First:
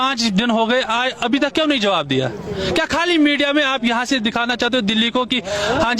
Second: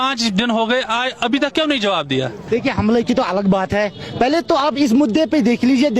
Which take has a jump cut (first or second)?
second